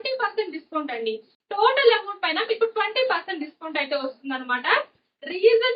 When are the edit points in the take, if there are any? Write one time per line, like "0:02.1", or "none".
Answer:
0:01.3